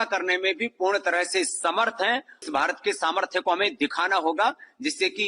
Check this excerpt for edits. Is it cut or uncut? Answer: cut